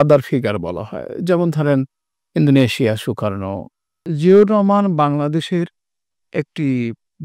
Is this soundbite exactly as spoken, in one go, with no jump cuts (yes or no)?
no